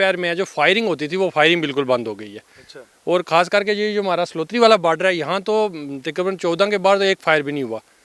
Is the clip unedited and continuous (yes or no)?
yes